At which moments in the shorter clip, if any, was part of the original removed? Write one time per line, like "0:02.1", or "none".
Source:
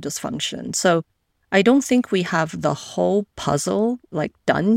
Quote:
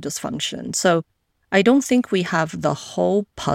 none